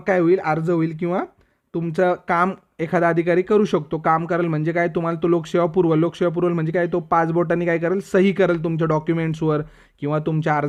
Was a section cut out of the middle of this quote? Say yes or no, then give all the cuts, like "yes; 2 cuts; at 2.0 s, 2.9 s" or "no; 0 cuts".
no; 0 cuts